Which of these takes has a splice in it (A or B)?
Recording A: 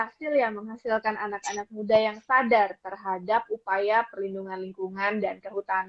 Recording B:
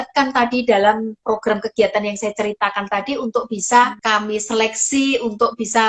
B